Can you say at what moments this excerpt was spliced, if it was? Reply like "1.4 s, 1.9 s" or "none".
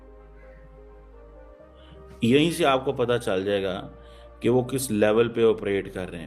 2.2 s